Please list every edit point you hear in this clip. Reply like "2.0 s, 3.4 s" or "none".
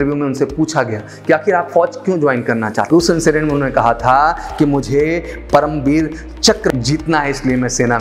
2.8 s, 6.7 s

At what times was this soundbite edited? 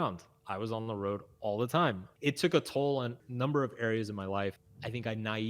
2.1 s, 3.2 s, 4.6 s

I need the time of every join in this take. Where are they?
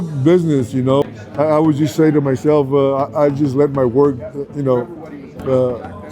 1.0 s

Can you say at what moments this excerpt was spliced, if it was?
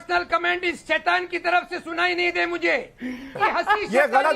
3.3 s

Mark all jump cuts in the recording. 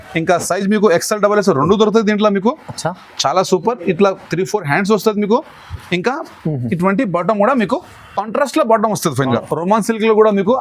9.4 s

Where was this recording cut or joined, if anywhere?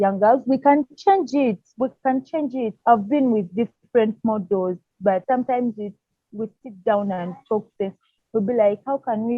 2.8 s, 5.2 s

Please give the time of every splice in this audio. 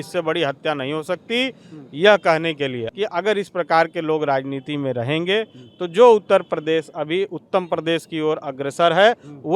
2.8 s

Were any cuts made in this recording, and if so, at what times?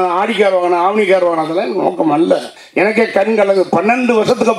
2.6 s

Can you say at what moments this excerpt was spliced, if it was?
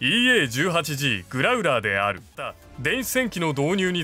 2.7 s

